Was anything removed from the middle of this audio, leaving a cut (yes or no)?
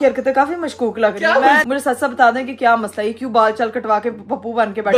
yes